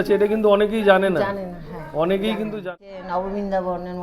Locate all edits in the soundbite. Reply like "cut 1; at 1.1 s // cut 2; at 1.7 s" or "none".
cut 1; at 2.7 s

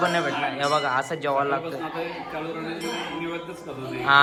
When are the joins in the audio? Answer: none

